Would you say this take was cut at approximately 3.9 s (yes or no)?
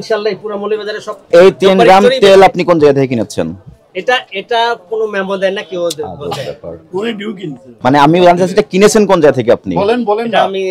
no